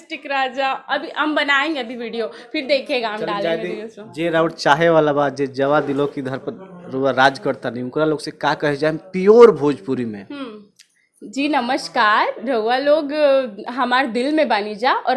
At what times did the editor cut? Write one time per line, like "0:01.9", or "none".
none